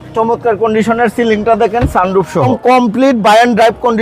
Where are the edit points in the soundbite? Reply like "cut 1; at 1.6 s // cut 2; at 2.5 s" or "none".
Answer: cut 1; at 2.5 s